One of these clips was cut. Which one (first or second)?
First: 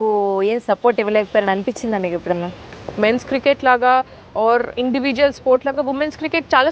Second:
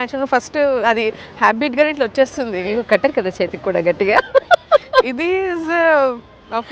first